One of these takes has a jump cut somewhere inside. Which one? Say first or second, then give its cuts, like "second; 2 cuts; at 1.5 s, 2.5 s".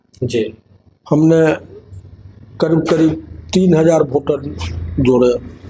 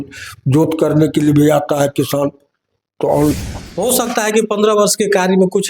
second; 1 cut; at 3.3 s